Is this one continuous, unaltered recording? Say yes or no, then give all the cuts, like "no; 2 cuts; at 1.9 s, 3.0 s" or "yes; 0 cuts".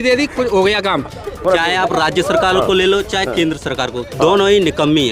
no; 1 cut; at 1.4 s